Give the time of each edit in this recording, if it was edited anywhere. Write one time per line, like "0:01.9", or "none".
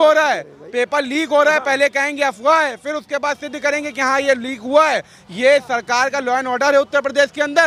none